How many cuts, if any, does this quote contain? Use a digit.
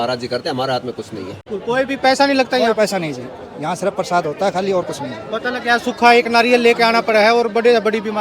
1